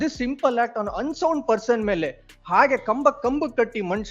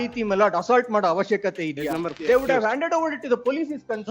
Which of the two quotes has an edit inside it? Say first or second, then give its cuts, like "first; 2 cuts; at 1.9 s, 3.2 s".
second; 1 cut; at 2.1 s